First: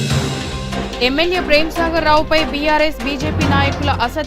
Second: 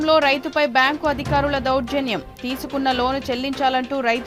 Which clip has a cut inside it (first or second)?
first